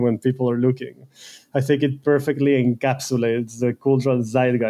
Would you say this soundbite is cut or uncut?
uncut